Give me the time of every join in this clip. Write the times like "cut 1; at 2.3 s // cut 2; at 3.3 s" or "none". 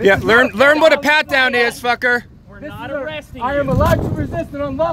none